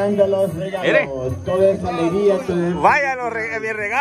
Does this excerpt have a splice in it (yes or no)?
no